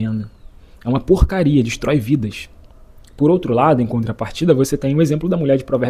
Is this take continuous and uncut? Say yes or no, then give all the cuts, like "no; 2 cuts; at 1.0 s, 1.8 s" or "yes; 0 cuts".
yes; 0 cuts